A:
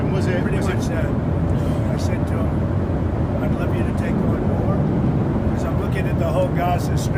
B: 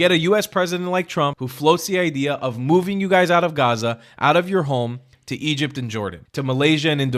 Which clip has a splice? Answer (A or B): B